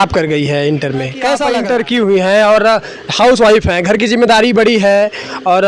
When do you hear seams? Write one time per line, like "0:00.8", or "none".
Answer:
0:01.4